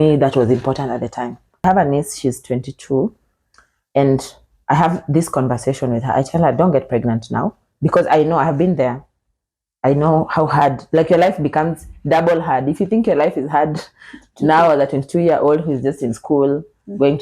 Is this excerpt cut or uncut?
cut